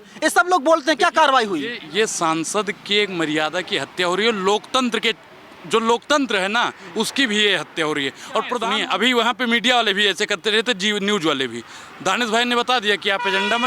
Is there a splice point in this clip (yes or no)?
yes